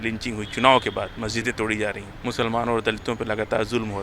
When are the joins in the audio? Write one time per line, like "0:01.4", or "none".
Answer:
0:02.1